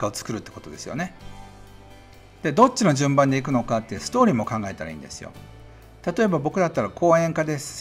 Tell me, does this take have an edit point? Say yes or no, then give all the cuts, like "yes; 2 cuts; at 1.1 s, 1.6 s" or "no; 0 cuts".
no; 0 cuts